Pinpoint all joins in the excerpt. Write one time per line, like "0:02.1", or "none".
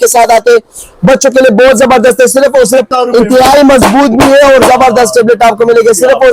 0:02.9

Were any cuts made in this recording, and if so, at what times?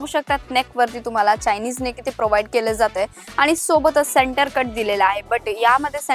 none

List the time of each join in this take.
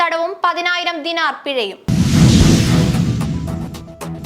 0:01.8

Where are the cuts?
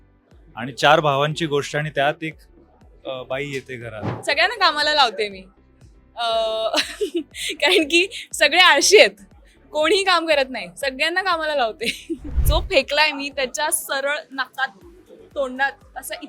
0:04.1
0:12.3

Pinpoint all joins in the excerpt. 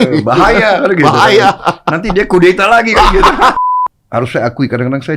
0:03.6

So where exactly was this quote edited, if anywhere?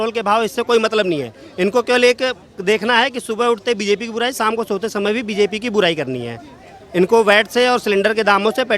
none

